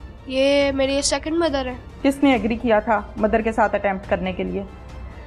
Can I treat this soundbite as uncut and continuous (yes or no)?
no